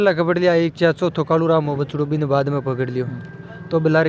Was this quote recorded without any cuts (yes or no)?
yes